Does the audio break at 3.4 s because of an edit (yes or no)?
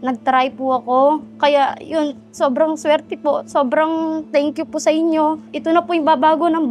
no